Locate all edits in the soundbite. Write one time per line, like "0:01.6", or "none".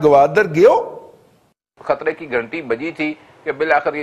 0:01.7